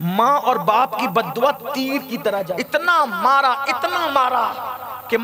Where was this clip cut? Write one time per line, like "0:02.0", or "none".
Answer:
0:02.6

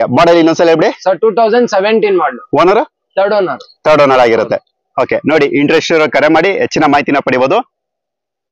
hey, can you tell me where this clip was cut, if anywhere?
none

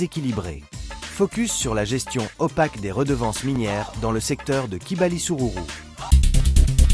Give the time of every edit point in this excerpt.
0:06.0

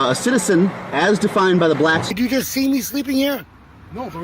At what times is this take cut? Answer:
0:02.1

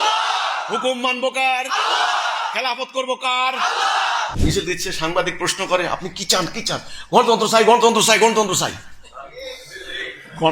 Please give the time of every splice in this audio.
0:04.3

